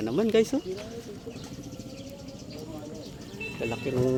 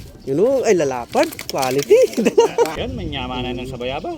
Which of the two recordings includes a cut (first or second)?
second